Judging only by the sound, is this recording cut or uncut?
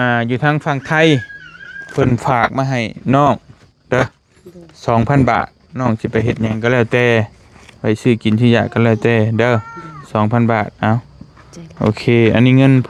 uncut